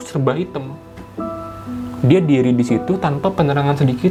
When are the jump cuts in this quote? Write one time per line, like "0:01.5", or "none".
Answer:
none

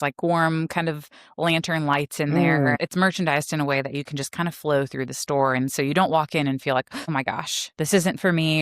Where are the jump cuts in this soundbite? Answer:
0:02.8
0:07.0

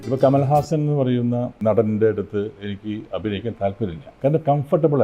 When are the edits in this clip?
0:01.5
0:04.1

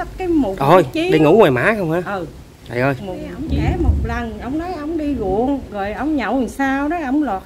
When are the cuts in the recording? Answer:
0:03.4

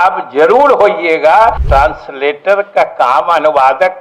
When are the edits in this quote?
0:01.6

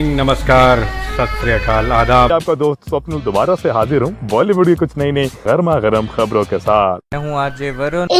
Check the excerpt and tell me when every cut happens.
none

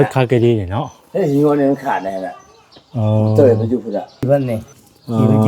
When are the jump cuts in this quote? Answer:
0:04.2

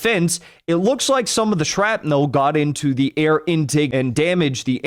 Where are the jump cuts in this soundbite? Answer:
0:03.9

